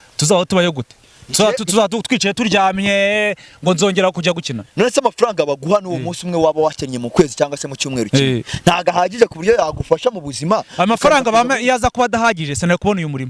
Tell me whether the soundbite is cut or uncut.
uncut